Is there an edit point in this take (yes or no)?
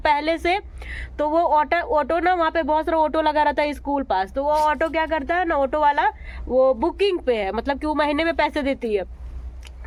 no